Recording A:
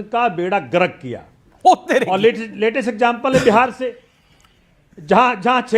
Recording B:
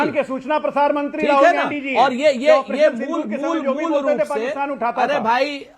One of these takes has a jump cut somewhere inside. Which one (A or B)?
A